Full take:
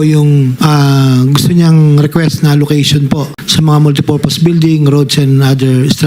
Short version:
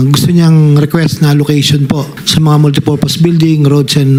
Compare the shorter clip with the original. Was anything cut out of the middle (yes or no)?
no